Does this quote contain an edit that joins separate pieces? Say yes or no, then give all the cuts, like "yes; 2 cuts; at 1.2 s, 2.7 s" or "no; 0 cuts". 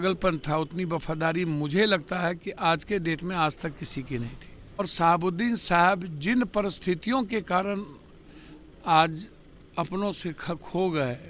yes; 1 cut; at 4.8 s